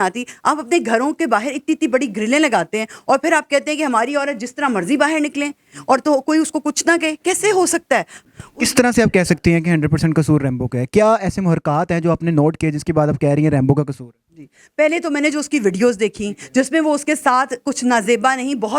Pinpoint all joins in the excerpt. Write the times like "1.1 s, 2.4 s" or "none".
8.2 s